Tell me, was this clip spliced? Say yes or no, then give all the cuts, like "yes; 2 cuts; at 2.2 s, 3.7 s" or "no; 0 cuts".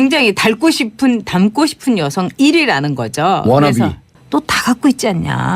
yes; 1 cut; at 4.1 s